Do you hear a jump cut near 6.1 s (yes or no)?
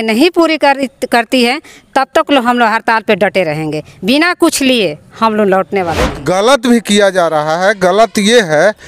yes